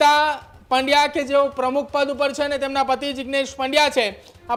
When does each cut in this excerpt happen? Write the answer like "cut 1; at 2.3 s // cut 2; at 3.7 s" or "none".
none